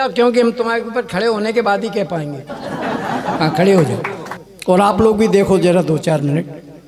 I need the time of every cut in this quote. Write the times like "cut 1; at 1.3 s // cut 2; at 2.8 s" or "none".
cut 1; at 2.5 s // cut 2; at 3.4 s